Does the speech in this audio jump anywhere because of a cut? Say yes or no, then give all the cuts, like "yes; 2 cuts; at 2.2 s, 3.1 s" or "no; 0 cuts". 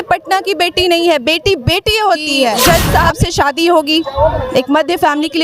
yes; 1 cut; at 2.6 s